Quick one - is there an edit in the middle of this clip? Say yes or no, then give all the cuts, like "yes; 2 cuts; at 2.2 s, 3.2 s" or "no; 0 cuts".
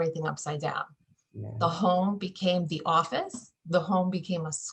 no; 0 cuts